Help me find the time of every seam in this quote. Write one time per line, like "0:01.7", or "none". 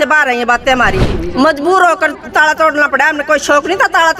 0:01.1